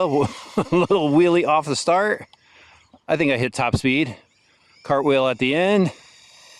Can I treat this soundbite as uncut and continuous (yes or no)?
yes